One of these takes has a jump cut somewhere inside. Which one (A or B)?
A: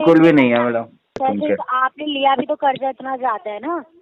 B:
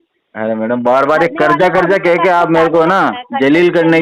A